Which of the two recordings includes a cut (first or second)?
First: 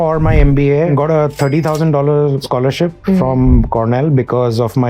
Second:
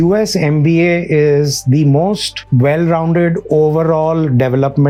first